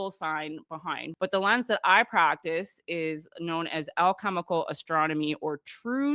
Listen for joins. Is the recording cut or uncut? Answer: cut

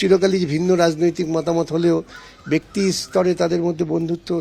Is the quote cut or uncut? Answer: uncut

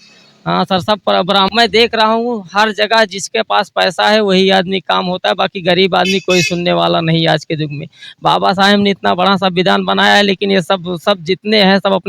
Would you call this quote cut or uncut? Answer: cut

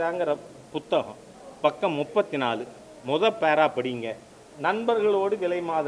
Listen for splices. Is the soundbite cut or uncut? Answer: uncut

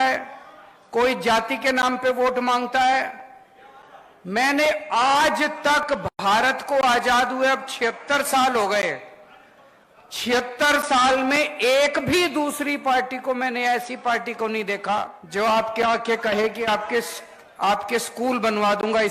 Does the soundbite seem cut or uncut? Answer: cut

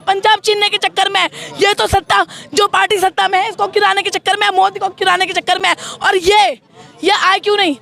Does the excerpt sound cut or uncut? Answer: uncut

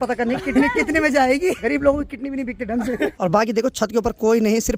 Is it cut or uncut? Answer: cut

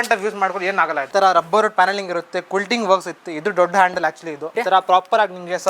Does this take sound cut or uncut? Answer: cut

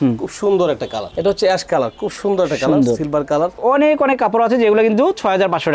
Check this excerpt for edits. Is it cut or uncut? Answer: cut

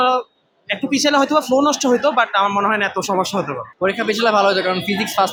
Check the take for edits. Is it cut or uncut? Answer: uncut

